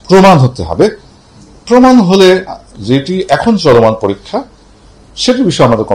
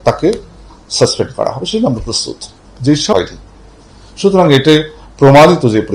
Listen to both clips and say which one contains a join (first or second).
second